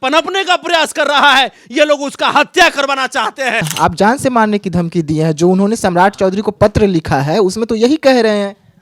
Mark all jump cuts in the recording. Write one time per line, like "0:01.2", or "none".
0:03.7